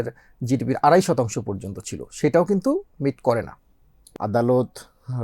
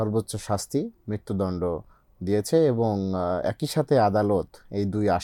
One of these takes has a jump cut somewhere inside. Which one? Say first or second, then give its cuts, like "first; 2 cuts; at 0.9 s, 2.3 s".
first; 1 cut; at 4.0 s